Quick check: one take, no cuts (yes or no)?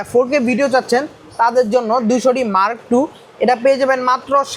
yes